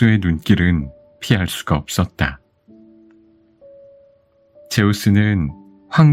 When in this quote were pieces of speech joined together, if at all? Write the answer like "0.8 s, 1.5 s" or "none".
2.4 s, 4.7 s